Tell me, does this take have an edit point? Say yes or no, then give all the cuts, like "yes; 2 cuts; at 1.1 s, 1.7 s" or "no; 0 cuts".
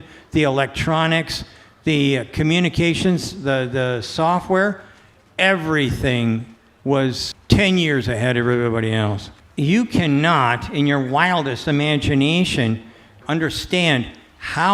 yes; 2 cuts; at 9.3 s, 13.2 s